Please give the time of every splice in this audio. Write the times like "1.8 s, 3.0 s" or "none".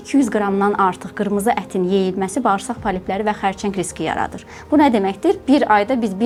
none